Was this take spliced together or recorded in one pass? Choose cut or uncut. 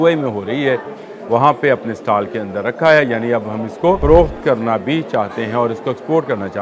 cut